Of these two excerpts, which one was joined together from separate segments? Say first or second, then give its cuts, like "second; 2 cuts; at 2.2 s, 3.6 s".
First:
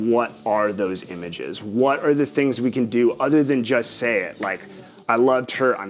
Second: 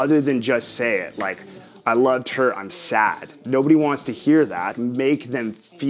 second; 1 cut; at 4.7 s